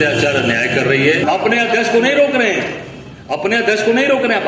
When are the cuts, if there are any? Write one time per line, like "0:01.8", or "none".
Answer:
0:01.2